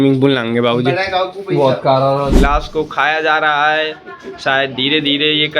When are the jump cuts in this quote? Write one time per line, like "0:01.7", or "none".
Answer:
0:02.4